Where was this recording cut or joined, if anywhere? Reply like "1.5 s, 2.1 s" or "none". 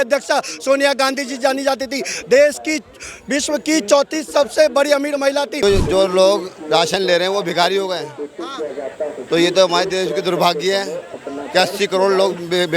5.6 s